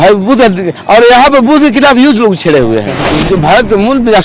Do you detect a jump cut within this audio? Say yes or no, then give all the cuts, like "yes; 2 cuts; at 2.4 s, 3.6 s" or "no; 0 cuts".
yes; 1 cut; at 3.1 s